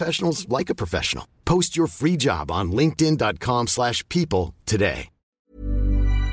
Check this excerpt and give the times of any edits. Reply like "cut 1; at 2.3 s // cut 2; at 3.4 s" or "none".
cut 1; at 5.4 s